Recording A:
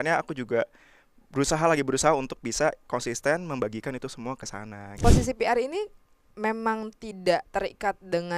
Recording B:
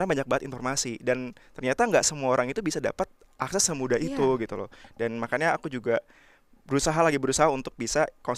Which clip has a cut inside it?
A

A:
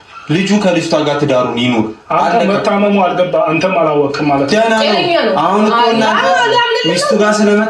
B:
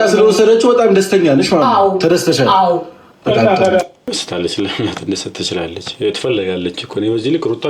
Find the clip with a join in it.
B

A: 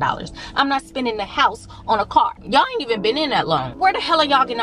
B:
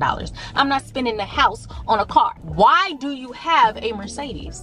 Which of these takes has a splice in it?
A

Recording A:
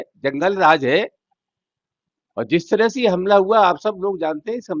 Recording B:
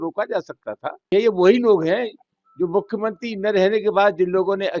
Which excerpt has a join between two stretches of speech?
B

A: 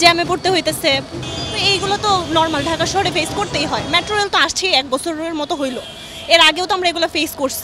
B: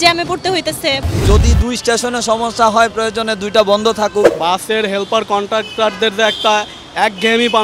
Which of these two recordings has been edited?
B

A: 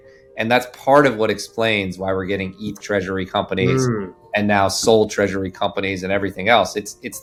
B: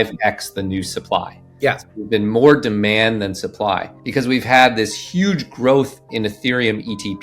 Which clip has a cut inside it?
B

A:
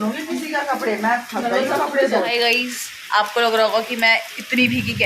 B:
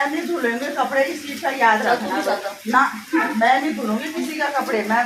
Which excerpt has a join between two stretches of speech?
A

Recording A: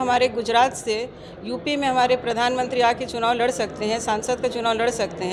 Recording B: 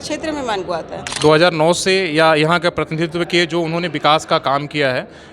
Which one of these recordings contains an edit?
B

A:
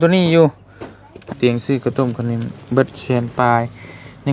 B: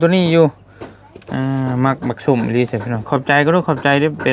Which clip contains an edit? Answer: A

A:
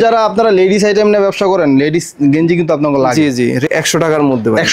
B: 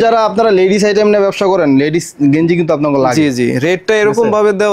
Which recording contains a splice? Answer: A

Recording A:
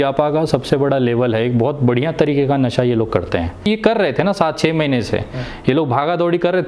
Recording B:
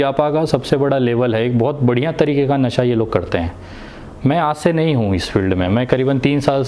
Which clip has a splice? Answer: A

